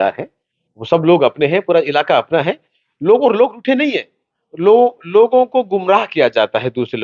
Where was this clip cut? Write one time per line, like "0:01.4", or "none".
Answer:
none